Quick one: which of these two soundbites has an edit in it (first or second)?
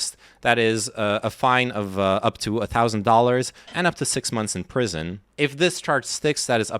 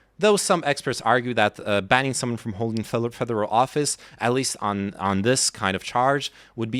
first